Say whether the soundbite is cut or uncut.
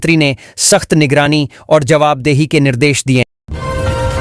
cut